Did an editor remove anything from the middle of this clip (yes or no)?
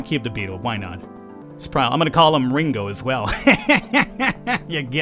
yes